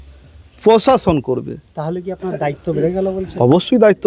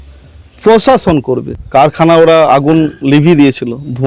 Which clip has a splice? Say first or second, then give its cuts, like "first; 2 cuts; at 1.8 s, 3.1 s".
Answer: second; 1 cut; at 1.5 s